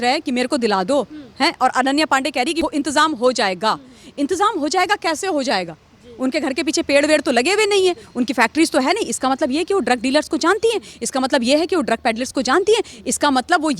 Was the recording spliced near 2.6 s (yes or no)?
yes